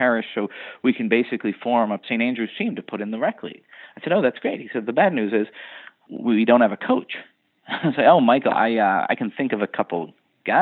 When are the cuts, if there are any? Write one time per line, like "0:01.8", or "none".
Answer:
0:02.0
0:06.1